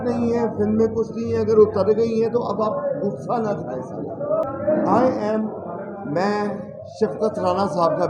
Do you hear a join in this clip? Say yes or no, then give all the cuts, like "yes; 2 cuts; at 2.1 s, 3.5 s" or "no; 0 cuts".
no; 0 cuts